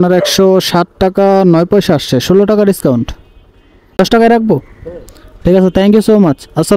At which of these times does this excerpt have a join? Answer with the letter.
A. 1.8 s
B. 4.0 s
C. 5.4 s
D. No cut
B